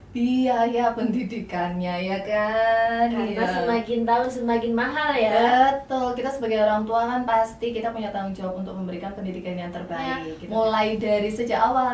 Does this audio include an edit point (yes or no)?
yes